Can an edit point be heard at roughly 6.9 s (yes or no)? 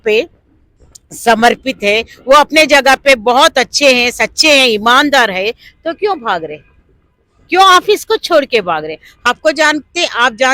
no